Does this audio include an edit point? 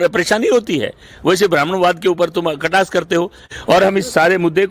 yes; 1 cut; at 3.4 s

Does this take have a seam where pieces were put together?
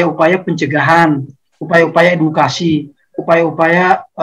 no; 0 cuts

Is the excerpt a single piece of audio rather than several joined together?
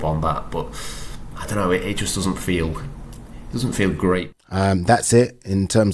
no; 1 cut; at 4.2 s

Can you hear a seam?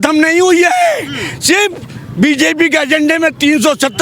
no; 0 cuts

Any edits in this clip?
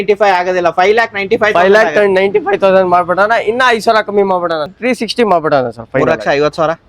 yes; 1 cut; at 4.7 s

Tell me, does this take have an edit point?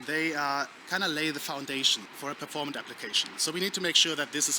yes; 1 cut; at 2.0 s

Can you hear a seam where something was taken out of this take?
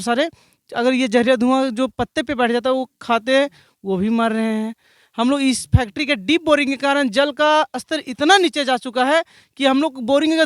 no; 0 cuts

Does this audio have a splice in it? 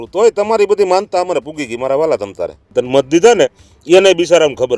yes; 1 cut; at 2.7 s

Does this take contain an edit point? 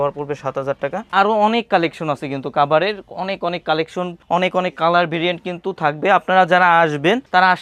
yes; 1 cut; at 1.1 s

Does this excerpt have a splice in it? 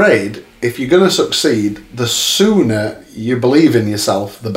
no; 0 cuts

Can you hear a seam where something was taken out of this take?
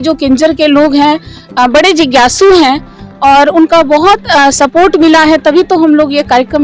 no; 0 cuts

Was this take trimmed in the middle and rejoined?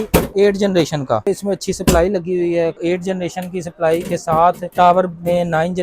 yes; 1 cut; at 1.2 s

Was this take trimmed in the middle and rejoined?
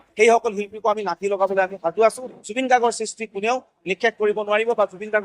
yes; 1 cut; at 2.3 s

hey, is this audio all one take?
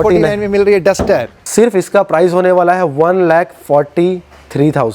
no; 1 cut; at 1.4 s

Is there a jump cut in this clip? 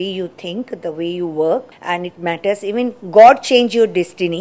yes; 1 cut; at 1.7 s

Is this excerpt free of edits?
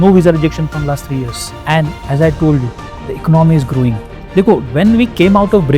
yes; 0 cuts

